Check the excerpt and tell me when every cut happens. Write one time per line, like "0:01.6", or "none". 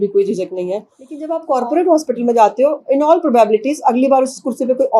0:01.3